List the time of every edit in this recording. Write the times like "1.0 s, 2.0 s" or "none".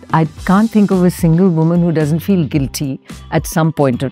none